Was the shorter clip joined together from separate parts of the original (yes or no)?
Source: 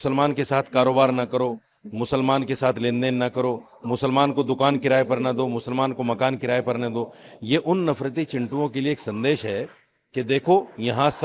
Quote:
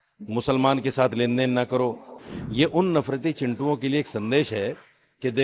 yes